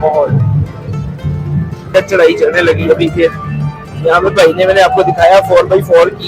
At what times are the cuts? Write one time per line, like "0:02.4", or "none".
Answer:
0:01.9